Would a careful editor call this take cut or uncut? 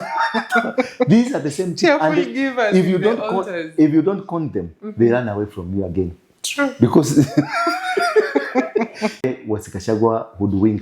cut